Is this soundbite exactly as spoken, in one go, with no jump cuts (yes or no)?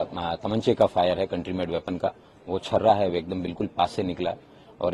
yes